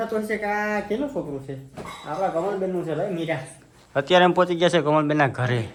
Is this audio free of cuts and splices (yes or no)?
yes